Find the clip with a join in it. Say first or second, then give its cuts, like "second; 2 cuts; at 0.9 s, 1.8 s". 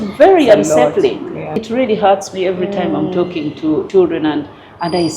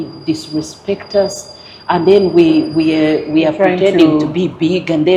first; 2 cuts; at 1.5 s, 3.9 s